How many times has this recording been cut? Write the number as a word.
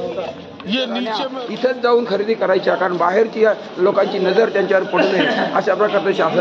one